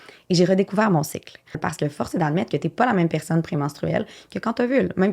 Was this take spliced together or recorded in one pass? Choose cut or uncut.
cut